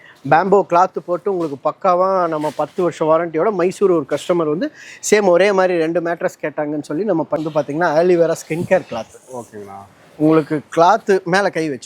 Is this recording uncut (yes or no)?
no